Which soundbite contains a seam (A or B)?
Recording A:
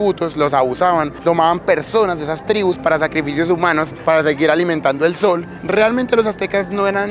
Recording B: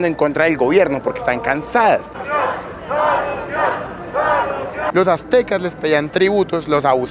B